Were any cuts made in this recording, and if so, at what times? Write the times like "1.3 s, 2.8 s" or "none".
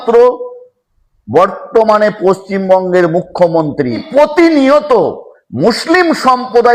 4.1 s

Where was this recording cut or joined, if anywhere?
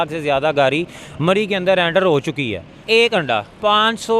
2.7 s

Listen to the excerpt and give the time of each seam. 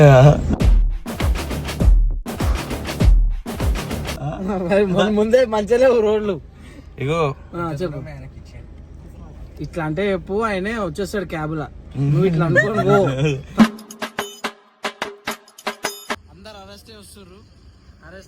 16.3 s

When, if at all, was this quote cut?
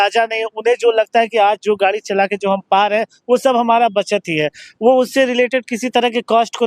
none

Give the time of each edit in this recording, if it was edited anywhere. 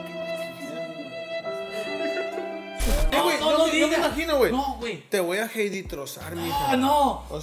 3.1 s

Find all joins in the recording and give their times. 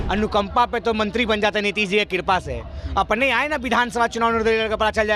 none

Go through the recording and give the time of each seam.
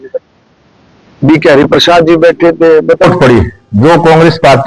3.0 s

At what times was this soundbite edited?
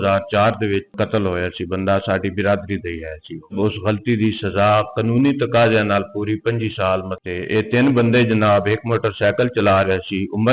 0.9 s, 3.5 s, 7.2 s

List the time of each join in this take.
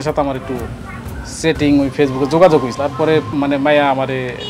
3.4 s

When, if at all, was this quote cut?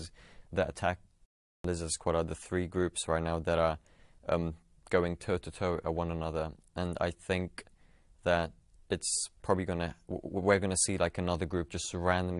1.5 s

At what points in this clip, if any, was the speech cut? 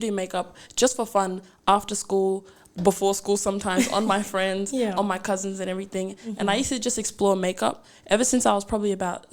none

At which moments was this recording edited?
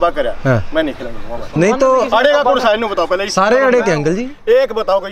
none

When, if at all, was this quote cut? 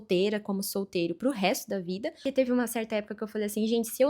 2.3 s

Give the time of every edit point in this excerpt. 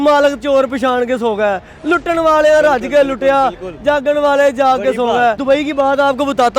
5.4 s

